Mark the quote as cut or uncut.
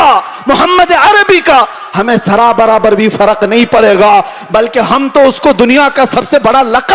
uncut